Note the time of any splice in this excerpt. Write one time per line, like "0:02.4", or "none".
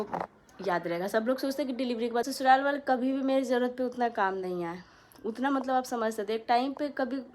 0:02.3